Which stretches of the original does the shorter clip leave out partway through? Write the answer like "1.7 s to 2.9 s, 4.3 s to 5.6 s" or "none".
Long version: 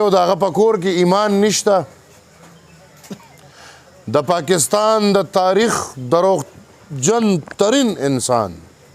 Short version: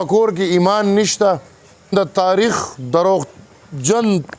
2.4 s to 5.1 s